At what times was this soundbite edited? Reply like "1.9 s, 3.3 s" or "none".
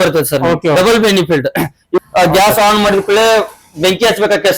2.0 s